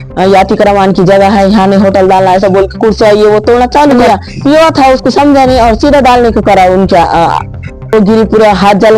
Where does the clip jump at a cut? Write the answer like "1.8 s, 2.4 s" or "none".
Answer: 4.0 s, 7.9 s